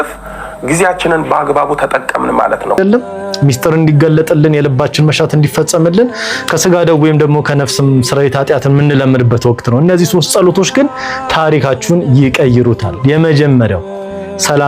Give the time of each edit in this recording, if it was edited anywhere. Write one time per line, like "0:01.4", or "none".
0:02.8